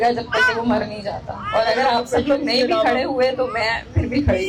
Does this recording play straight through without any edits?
yes; 0 cuts

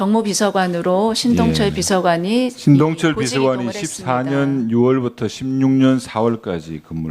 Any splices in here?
yes; 1 cut; at 5.0 s

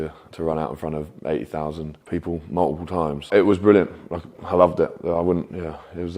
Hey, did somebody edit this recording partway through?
yes; 2 cuts; at 2.0 s, 3.3 s

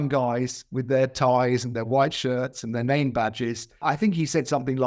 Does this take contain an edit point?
yes; 1 cut; at 3.8 s

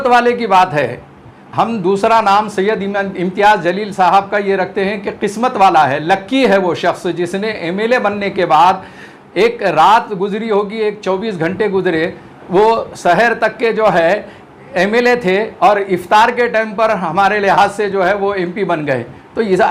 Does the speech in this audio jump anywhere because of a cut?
no; 0 cuts

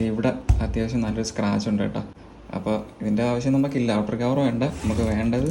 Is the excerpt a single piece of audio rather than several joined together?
yes; 0 cuts

